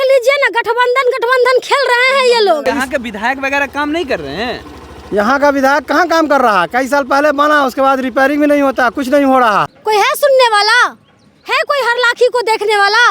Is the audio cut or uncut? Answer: cut